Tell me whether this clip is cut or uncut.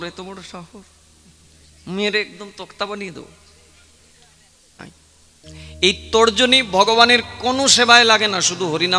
cut